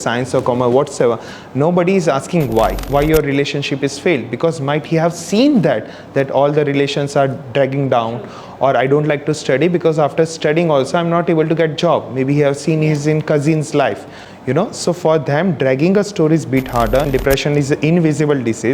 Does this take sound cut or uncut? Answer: cut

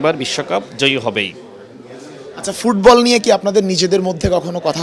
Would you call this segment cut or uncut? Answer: uncut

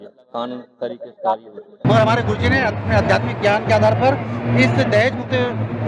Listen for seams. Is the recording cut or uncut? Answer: cut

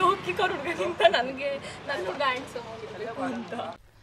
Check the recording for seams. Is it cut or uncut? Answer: uncut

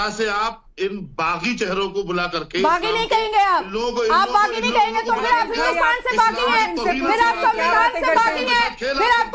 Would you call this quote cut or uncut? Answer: uncut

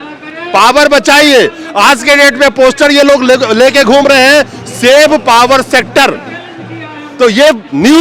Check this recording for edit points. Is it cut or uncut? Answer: uncut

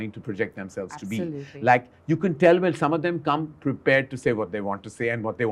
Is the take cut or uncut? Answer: uncut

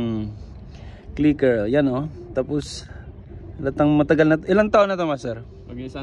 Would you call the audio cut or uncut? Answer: uncut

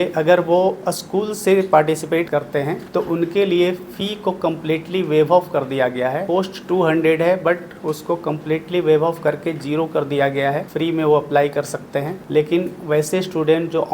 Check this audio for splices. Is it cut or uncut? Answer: cut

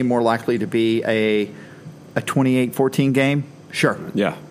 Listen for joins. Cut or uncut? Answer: uncut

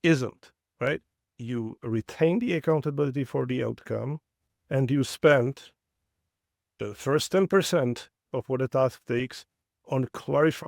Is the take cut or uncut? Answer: cut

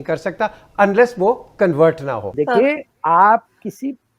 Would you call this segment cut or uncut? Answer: cut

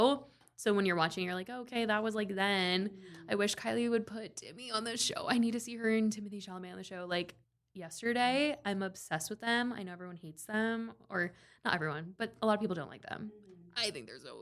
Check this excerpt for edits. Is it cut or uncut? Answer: uncut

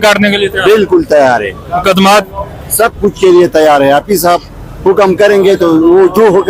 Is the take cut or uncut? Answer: uncut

